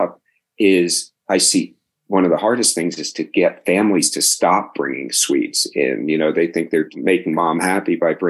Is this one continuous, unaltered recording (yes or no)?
no